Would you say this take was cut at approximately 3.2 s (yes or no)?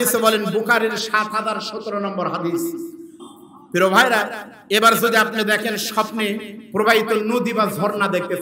yes